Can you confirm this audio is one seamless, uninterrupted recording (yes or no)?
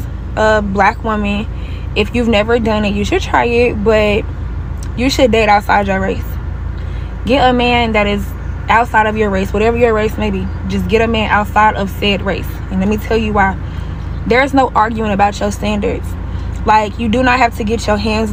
yes